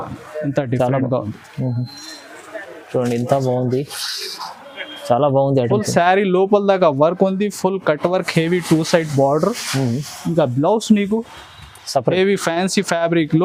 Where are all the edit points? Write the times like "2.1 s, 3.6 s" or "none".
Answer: none